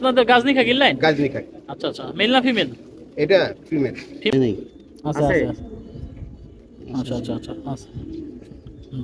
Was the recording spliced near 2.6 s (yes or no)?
no